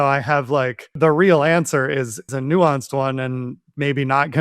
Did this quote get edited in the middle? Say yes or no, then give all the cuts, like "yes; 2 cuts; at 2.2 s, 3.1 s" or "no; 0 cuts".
yes; 2 cuts; at 0.9 s, 2.3 s